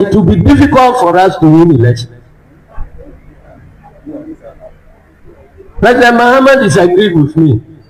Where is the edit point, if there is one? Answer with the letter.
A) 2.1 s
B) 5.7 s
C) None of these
C